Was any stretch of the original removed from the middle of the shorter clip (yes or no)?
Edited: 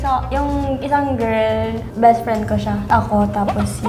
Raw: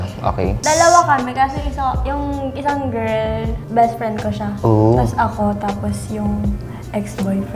yes